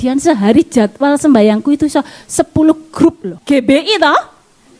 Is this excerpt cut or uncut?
cut